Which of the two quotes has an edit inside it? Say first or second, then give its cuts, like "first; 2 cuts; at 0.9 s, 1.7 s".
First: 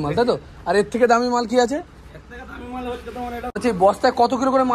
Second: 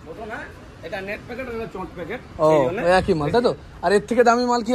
first; 1 cut; at 3.5 s